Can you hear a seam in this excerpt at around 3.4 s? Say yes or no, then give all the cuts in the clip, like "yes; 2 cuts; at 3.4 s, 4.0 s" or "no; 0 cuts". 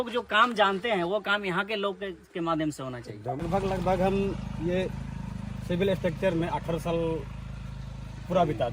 yes; 1 cut; at 3.4 s